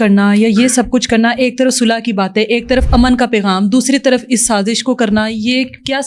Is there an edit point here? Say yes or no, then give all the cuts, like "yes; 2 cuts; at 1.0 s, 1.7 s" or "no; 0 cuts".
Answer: no; 0 cuts